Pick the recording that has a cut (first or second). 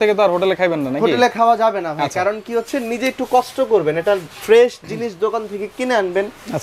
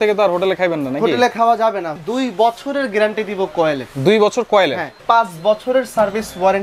second